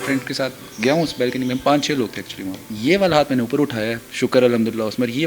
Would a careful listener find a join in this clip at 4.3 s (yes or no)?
no